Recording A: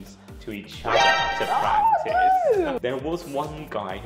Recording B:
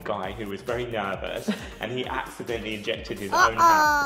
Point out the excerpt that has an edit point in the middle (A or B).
A